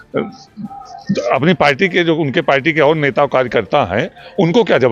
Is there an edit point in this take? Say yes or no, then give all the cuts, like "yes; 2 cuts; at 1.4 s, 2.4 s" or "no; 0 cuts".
no; 0 cuts